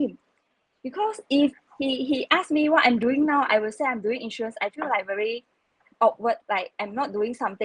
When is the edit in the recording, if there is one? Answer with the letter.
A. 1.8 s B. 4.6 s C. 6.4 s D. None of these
C